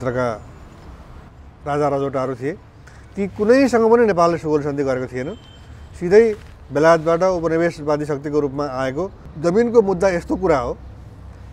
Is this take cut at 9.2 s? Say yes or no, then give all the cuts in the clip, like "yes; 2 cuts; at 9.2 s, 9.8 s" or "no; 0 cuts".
yes; 1 cut; at 9.2 s